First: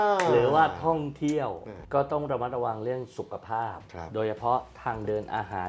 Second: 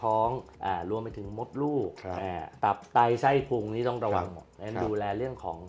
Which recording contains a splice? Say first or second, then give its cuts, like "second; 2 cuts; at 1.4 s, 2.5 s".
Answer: first; 1 cut; at 1.7 s